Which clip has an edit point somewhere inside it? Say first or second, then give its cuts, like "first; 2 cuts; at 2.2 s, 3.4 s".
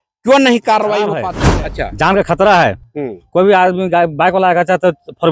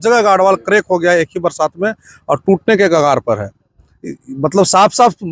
first; 1 cut; at 1.3 s